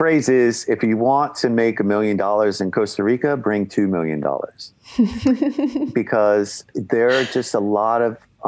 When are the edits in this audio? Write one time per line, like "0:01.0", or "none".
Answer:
none

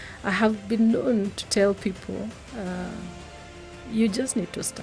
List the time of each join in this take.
none

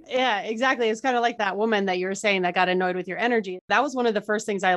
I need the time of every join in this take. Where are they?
0:01.4
0:03.6

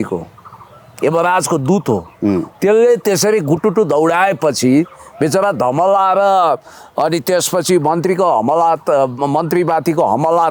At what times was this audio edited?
none

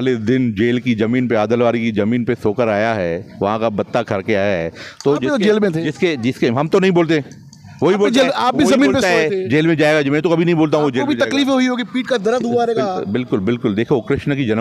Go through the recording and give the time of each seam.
none

